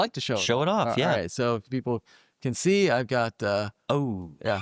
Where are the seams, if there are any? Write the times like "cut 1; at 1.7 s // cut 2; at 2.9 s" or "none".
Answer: none